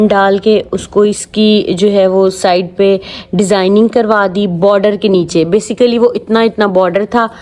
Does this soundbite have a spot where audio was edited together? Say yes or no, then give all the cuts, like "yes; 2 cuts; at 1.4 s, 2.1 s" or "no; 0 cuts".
no; 0 cuts